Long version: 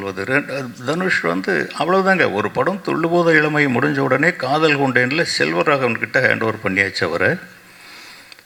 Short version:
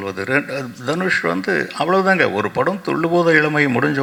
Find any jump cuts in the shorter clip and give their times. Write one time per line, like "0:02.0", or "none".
none